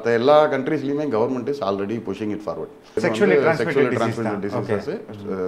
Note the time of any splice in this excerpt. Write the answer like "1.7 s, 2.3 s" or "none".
3.0 s